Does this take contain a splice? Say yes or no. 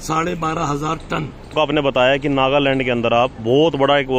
yes